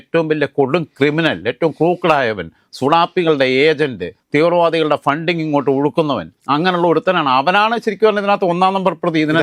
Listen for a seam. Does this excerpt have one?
no; 0 cuts

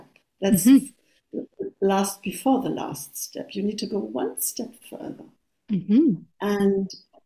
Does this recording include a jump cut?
no; 0 cuts

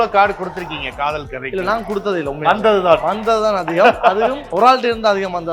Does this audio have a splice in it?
yes; 1 cut; at 4.4 s

